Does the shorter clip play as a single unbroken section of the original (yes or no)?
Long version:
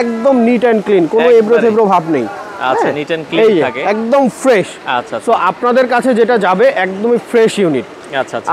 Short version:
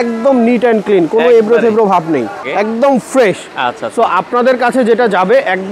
no